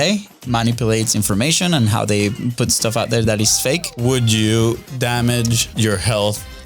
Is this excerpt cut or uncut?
cut